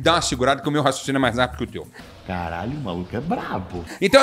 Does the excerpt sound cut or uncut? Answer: uncut